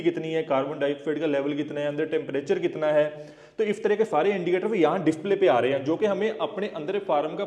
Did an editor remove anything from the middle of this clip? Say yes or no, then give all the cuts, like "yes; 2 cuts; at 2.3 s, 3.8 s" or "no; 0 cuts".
no; 0 cuts